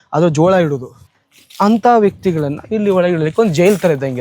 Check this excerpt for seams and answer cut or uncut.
cut